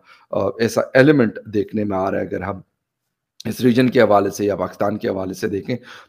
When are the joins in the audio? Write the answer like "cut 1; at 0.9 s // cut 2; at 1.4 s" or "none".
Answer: none